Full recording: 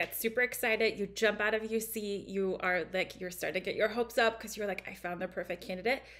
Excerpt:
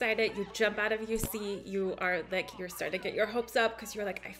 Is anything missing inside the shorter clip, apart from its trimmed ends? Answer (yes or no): no